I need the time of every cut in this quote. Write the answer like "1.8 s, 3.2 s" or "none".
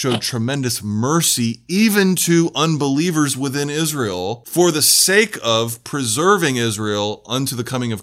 4.4 s